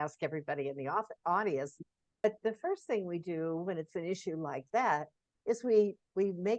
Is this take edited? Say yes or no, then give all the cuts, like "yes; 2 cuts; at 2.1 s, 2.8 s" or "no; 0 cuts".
yes; 1 cut; at 2.2 s